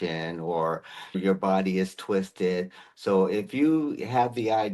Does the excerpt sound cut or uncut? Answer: cut